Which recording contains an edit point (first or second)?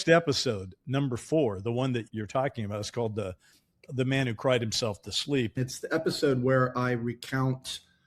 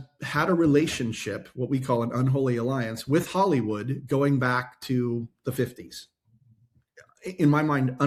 first